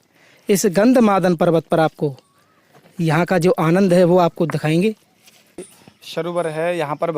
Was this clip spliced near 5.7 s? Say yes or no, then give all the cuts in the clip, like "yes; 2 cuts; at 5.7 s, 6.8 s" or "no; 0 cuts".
yes; 1 cut; at 5.7 s